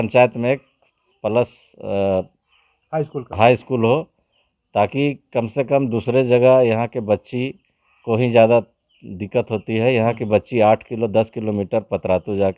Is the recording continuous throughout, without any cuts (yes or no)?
yes